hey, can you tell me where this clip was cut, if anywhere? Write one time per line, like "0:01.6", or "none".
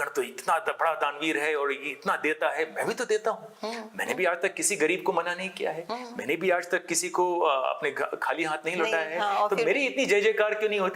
none